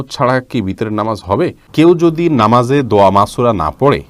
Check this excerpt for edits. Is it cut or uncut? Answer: cut